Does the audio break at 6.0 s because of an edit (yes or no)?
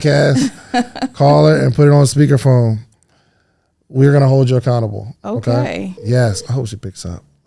yes